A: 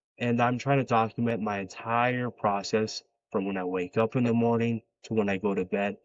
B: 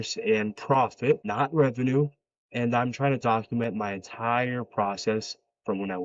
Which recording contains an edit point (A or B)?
B